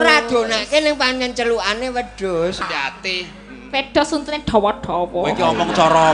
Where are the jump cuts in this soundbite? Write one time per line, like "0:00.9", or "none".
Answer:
0:02.6